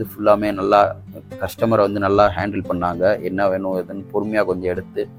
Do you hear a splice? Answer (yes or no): no